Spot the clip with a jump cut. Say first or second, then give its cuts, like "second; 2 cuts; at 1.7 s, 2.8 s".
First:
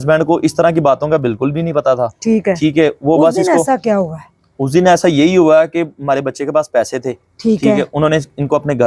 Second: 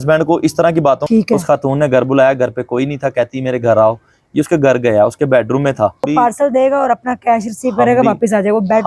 second; 2 cuts; at 1.0 s, 6.1 s